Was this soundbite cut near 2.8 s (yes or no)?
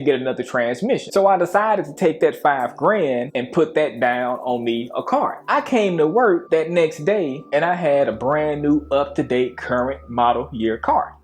no